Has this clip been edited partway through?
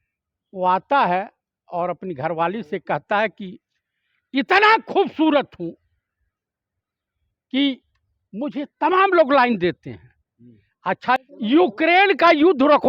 yes; 1 cut; at 11.2 s

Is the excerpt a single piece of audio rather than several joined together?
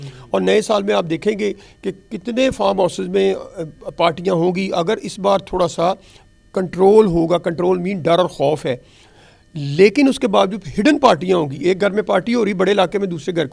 yes; 0 cuts

